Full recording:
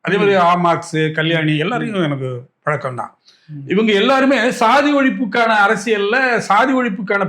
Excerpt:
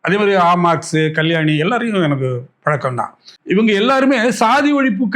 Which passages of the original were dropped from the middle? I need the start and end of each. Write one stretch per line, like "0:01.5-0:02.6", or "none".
0:03.3-0:03.5